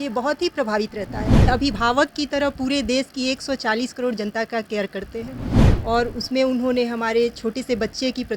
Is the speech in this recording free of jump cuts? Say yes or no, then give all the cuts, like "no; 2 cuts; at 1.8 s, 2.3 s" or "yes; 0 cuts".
no; 1 cut; at 1.5 s